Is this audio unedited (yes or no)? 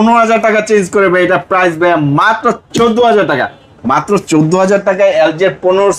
yes